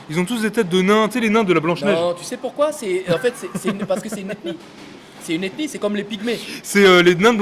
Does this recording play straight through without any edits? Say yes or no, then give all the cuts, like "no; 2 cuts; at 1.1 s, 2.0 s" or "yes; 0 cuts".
yes; 0 cuts